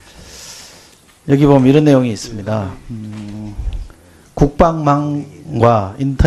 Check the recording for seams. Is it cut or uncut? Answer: uncut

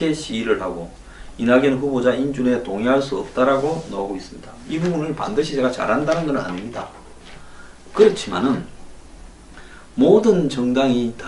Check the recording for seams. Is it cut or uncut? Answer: uncut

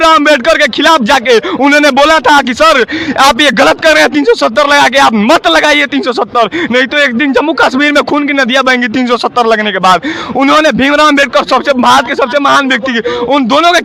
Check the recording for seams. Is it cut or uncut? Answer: uncut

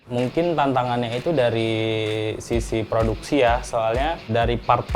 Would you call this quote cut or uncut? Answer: uncut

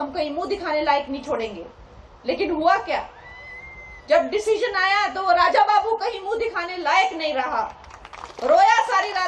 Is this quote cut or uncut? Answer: uncut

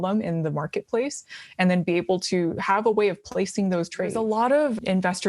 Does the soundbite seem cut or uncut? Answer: cut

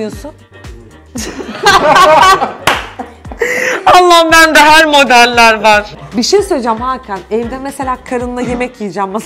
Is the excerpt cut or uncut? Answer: cut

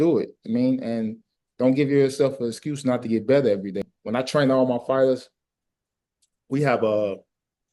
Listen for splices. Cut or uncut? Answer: cut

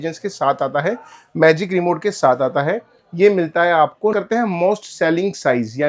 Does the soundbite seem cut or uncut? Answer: cut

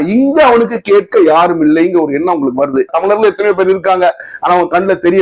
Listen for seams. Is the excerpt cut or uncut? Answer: cut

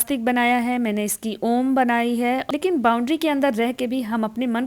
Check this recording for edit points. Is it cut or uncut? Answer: cut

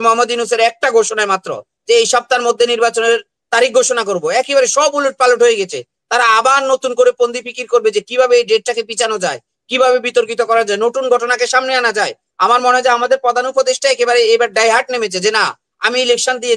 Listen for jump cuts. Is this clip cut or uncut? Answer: uncut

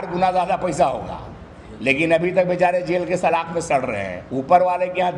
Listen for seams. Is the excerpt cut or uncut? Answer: cut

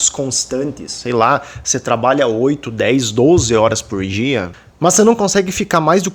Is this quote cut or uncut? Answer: cut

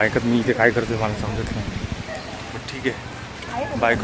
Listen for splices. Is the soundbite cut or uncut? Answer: uncut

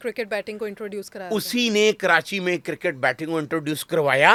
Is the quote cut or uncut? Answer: uncut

